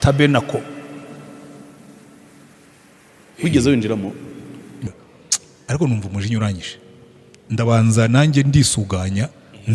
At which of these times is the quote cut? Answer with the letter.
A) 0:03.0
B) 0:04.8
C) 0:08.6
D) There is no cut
B